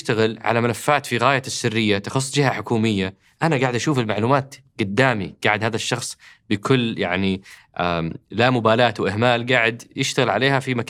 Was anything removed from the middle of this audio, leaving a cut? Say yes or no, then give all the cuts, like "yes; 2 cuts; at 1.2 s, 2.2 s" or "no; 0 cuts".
no; 0 cuts